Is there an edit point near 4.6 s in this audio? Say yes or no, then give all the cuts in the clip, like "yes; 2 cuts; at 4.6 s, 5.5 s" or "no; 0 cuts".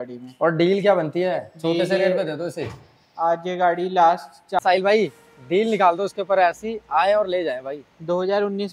yes; 1 cut; at 4.6 s